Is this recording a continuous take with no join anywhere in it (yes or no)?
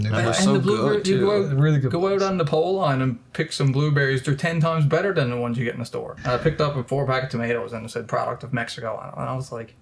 no